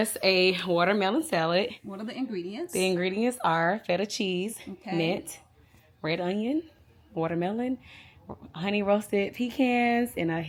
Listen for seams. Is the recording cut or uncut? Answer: uncut